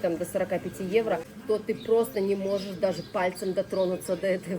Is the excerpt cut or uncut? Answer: cut